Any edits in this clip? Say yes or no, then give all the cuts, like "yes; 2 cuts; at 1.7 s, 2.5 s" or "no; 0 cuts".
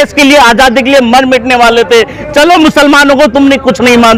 no; 0 cuts